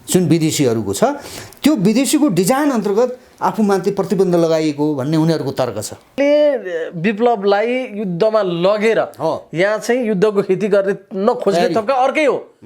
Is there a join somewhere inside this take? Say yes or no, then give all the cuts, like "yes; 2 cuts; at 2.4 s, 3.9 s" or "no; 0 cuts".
yes; 1 cut; at 6.2 s